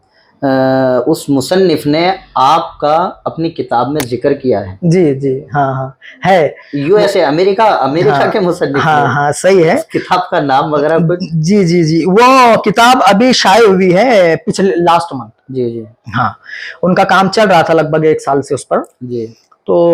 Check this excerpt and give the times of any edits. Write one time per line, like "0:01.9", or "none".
none

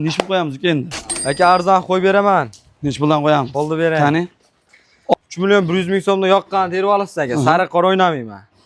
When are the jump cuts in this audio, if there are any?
0:05.1

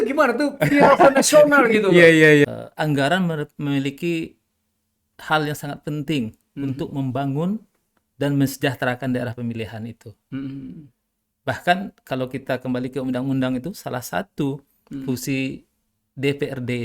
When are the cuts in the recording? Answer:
0:02.4

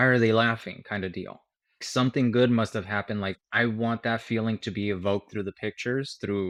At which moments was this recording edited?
none

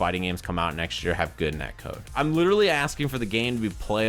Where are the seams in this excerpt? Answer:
0:02.1

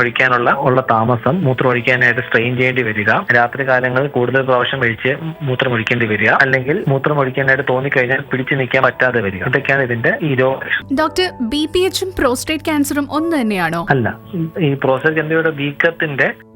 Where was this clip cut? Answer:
0:10.7

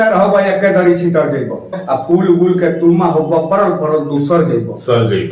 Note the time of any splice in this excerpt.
0:01.8

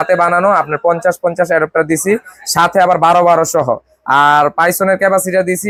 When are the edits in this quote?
none

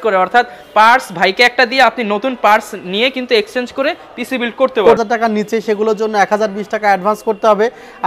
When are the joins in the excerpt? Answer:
0:05.0

